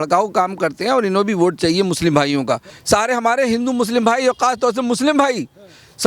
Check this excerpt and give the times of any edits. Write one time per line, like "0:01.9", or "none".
0:02.7